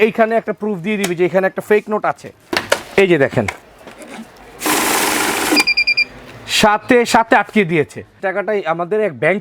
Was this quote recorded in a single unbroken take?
no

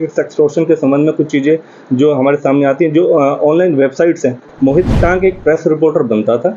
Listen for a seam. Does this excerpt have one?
yes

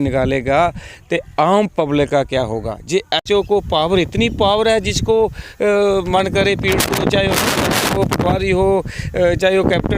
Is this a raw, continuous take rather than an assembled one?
no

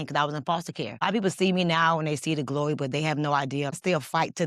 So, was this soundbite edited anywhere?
yes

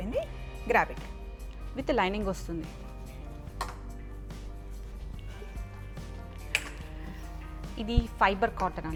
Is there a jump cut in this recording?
no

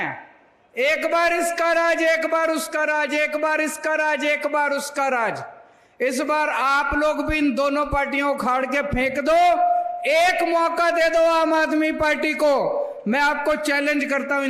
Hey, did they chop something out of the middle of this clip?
no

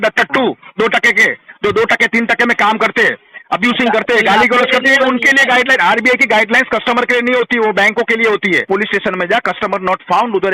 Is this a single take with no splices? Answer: no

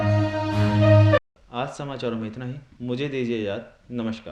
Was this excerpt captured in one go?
yes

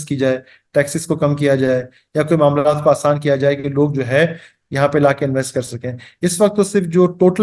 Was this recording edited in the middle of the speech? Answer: no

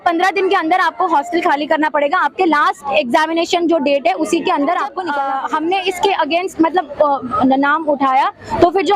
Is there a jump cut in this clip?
yes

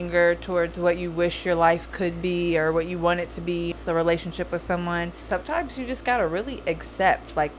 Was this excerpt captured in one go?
no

